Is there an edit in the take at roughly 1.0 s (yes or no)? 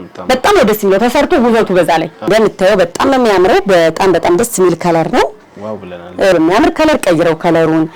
no